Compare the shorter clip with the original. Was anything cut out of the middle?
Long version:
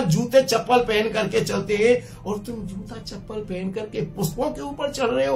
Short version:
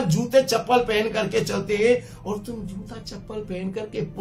no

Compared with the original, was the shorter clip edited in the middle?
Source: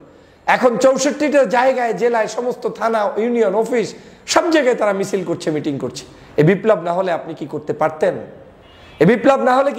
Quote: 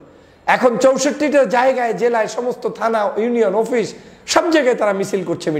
no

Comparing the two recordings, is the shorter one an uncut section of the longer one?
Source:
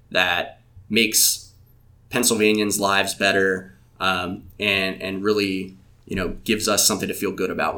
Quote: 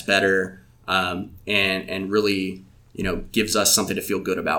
yes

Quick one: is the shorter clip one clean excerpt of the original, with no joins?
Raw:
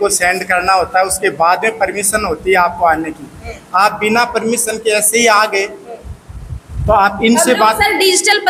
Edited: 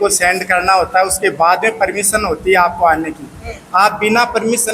yes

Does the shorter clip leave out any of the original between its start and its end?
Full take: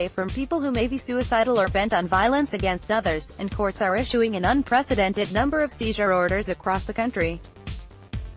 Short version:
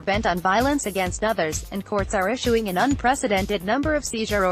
no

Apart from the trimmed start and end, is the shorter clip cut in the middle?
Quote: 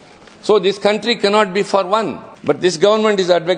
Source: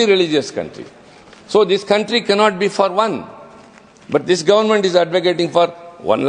yes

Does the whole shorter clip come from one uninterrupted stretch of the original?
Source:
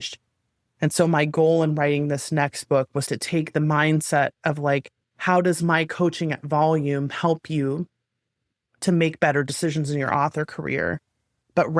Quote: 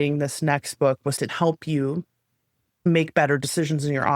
no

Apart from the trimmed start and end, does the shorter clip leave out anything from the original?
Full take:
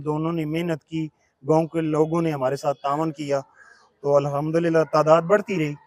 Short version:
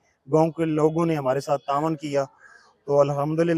no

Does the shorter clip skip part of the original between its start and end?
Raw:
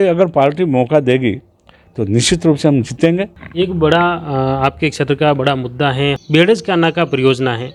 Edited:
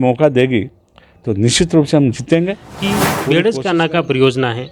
yes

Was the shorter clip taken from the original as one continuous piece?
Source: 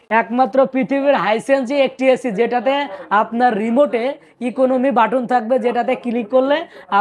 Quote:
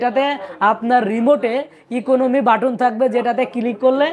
yes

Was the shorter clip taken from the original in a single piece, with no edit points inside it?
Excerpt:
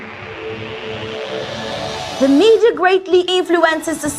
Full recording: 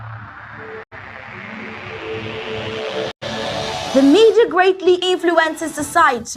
no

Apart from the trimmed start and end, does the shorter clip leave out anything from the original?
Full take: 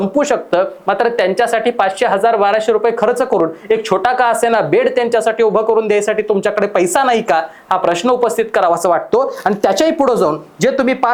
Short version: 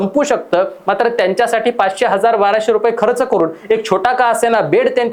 no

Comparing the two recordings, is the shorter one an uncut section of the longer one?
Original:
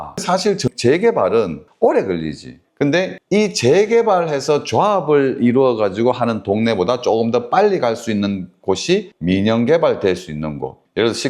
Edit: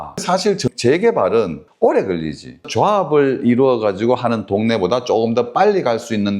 no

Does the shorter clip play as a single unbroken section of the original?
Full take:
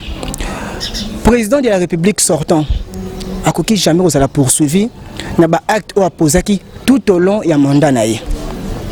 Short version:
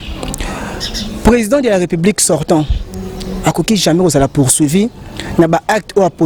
yes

